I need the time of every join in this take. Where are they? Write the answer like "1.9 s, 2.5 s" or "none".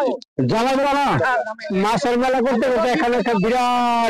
1.7 s